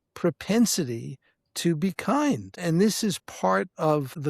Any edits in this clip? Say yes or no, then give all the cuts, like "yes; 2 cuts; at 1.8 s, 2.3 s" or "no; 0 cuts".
yes; 1 cut; at 2.6 s